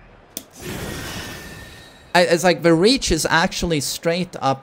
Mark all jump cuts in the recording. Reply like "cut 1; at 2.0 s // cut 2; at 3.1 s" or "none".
none